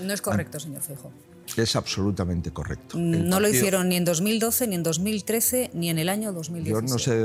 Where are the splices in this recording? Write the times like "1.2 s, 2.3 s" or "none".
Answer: none

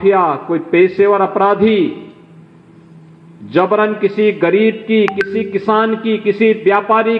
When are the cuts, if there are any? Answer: none

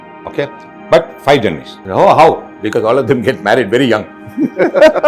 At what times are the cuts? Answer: 1.7 s

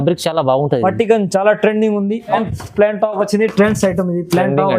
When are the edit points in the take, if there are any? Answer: 2.3 s

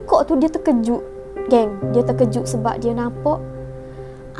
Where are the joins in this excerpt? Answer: none

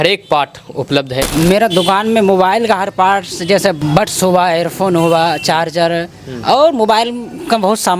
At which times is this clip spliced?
1.4 s, 3.8 s

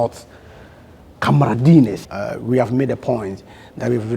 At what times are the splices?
2.0 s

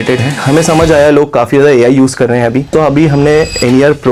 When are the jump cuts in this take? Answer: 2.7 s

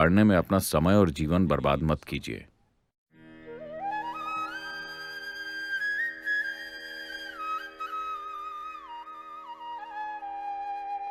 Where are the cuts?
none

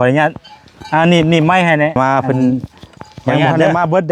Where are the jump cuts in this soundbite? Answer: 1.9 s

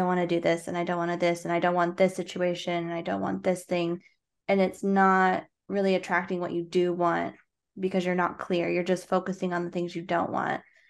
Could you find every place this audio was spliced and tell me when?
none

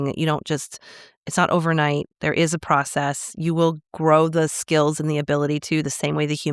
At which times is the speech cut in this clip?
none

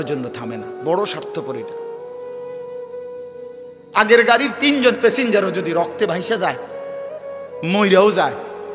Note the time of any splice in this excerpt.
1.5 s, 3.9 s

